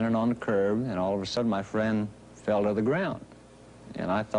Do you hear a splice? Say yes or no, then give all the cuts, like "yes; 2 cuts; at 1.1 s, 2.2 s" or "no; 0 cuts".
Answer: yes; 1 cut; at 1.1 s